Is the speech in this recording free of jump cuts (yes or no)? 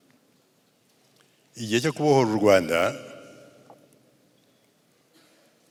yes